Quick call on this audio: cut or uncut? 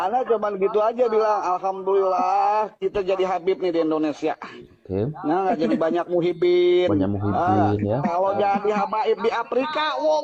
uncut